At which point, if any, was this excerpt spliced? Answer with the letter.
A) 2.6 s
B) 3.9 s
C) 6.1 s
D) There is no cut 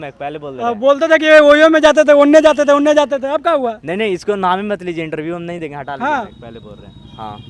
D